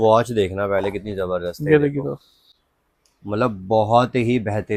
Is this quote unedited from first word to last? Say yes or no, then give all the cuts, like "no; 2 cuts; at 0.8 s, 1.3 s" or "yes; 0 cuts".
yes; 0 cuts